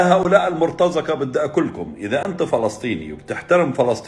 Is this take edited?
no; 0 cuts

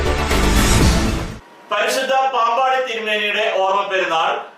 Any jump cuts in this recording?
yes; 1 cut; at 1.3 s

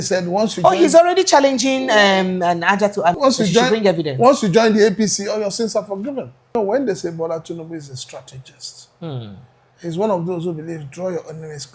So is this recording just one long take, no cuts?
no; 2 cuts; at 3.2 s, 6.5 s

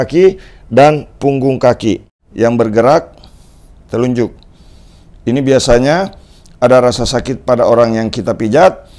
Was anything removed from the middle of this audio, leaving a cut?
yes; 1 cut; at 2.2 s

